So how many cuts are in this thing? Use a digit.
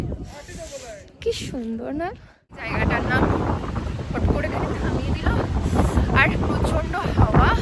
1